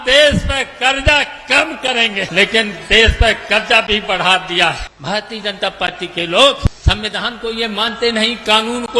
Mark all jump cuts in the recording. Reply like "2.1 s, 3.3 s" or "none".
2.3 s, 4.9 s, 6.7 s